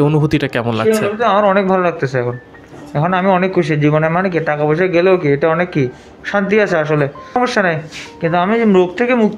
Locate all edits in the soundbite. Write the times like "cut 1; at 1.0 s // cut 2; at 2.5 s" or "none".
cut 1; at 7.4 s